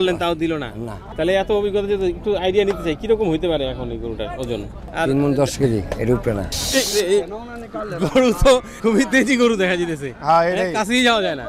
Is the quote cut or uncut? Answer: cut